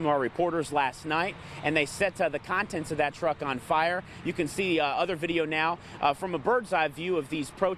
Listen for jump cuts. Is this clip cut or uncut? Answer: uncut